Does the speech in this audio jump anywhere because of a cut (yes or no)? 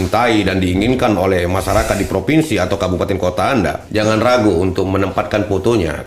yes